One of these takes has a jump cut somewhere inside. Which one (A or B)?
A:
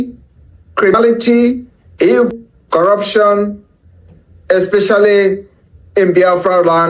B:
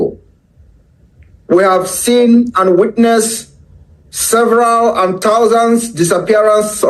A